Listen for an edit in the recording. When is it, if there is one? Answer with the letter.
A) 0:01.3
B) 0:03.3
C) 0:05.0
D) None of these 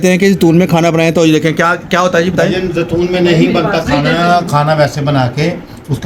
D